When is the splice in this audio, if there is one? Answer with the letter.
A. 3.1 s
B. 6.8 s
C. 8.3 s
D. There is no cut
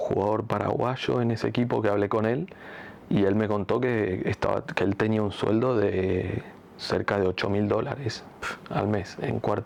D